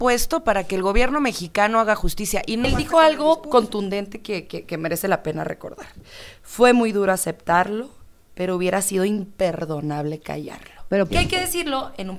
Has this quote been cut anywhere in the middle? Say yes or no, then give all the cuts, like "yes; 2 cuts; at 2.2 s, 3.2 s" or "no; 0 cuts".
yes; 2 cuts; at 2.6 s, 11.1 s